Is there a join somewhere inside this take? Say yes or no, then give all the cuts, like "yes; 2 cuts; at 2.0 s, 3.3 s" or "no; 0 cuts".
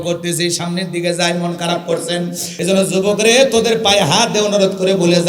yes; 1 cut; at 2.5 s